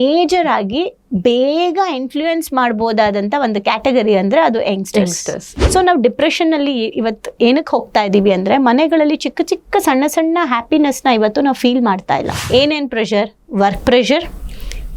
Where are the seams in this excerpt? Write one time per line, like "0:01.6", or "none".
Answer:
0:05.5
0:12.4